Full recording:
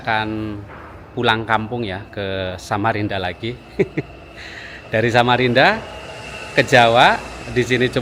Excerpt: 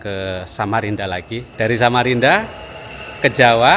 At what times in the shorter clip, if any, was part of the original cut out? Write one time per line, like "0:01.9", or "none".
0:01.4